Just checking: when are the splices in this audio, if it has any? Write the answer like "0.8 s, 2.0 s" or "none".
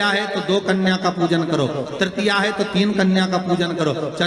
none